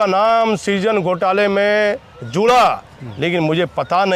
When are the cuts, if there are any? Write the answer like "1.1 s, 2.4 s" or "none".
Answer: none